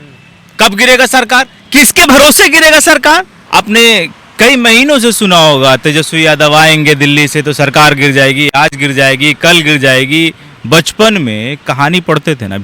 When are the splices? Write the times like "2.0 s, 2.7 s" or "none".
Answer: 3.4 s